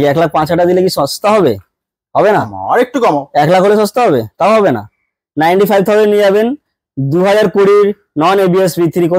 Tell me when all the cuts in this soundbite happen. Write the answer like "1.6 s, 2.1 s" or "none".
none